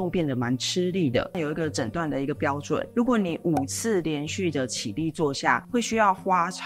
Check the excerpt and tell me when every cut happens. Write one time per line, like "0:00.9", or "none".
0:01.3